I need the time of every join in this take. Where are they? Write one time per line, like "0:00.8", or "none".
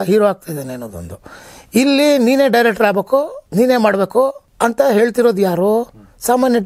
0:03.4
0:04.4